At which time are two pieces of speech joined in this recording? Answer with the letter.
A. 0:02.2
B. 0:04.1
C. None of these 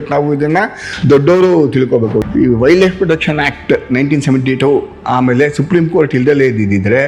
A